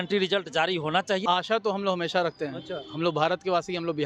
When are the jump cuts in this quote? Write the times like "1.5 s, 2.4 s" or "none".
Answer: 1.2 s